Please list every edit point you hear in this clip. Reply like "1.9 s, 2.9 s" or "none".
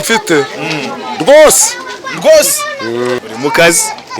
3.2 s